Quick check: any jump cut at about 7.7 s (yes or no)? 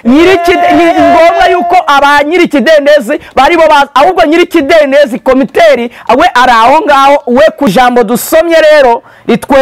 yes